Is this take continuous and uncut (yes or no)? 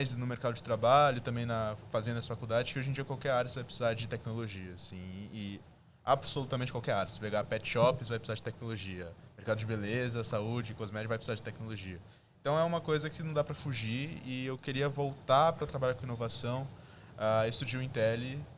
yes